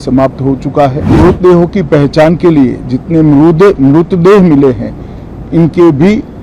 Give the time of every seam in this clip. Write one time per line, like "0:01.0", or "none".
0:01.2